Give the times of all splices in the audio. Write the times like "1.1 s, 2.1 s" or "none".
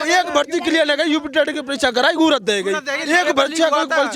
none